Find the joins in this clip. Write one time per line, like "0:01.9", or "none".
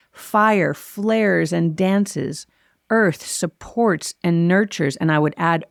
none